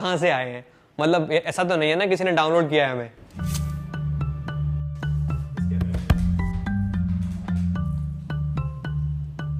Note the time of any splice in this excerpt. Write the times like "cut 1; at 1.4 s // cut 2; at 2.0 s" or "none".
none

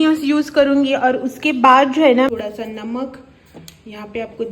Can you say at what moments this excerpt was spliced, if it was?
cut 1; at 2.3 s

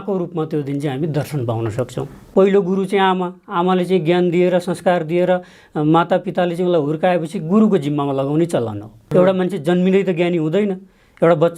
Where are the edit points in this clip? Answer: cut 1; at 2.2 s // cut 2; at 9.1 s

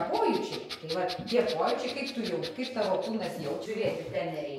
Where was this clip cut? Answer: cut 1; at 3.6 s

